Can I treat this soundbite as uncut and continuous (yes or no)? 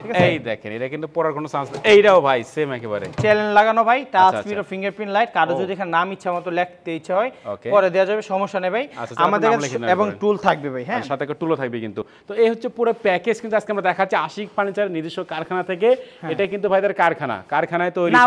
yes